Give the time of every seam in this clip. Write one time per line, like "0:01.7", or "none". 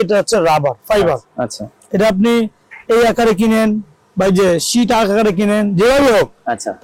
none